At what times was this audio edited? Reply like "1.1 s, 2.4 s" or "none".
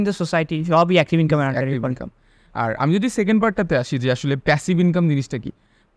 none